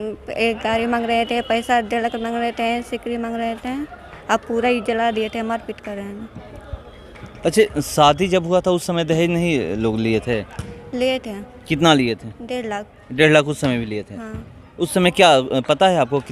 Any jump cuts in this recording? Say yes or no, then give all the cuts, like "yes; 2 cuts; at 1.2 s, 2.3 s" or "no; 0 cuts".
no; 0 cuts